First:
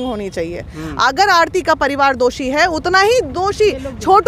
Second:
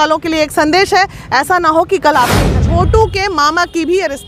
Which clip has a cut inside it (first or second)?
second